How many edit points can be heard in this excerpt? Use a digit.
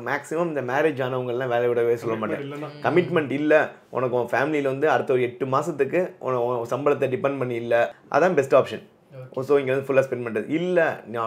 1